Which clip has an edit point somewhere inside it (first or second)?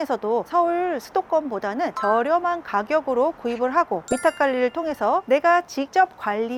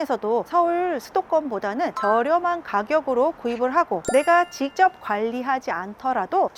second